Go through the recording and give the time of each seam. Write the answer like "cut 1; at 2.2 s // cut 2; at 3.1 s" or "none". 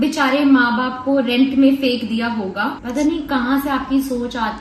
cut 1; at 2.7 s

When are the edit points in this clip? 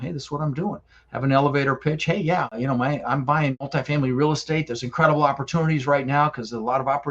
cut 1; at 2.6 s // cut 2; at 3.6 s

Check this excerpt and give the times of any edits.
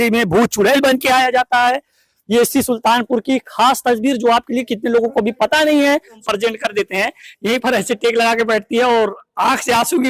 cut 1; at 6.2 s

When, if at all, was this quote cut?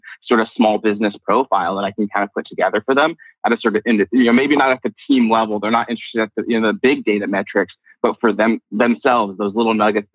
none

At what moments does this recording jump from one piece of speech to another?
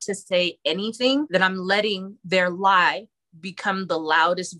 cut 1; at 1.3 s

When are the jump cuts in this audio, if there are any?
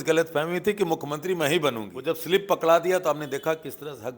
cut 1; at 1.9 s

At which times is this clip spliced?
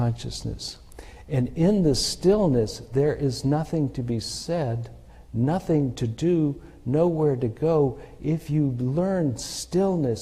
none

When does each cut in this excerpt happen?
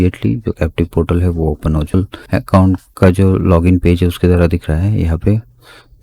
cut 1; at 1.9 s

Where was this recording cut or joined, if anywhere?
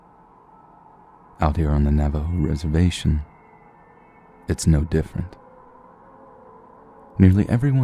none

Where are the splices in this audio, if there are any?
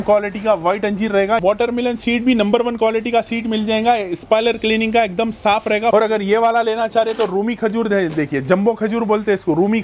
cut 1; at 1.4 s // cut 2; at 5.9 s

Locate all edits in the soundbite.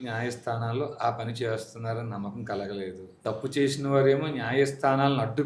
cut 1; at 3.1 s

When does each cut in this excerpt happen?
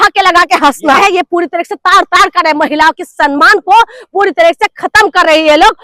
cut 1; at 1.0 s

